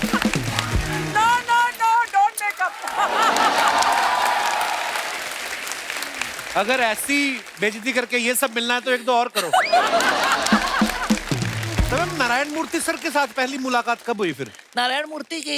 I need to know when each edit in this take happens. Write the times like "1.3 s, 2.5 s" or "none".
11.9 s